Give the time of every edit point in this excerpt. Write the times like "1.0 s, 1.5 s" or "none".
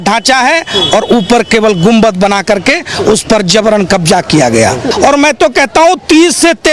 4.9 s